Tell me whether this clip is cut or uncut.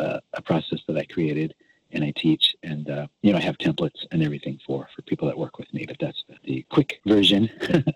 cut